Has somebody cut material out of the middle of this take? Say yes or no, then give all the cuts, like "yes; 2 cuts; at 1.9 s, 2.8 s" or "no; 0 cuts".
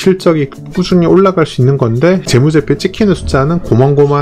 yes; 1 cut; at 2.3 s